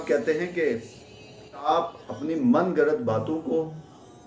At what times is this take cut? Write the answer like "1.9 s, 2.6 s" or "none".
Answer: 1.7 s